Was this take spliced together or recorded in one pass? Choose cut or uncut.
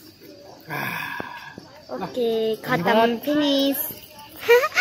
uncut